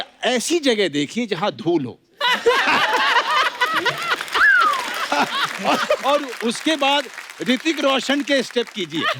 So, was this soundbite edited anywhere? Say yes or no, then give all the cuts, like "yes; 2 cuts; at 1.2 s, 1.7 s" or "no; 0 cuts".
yes; 1 cut; at 5.1 s